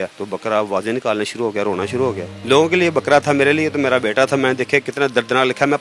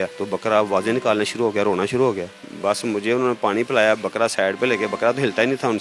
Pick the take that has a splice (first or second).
first